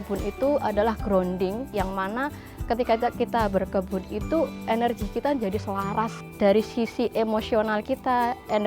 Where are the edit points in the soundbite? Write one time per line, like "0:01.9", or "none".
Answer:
0:01.7
0:06.2

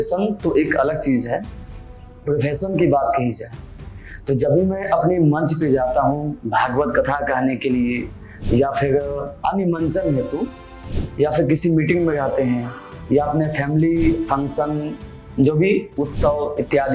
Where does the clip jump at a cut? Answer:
0:09.3

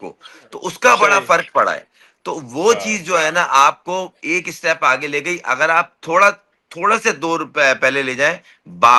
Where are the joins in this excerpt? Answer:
none

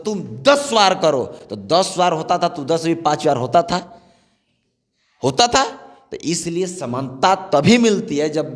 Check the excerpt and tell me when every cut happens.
none

